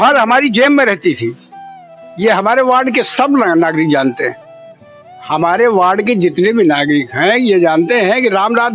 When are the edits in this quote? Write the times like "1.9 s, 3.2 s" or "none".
none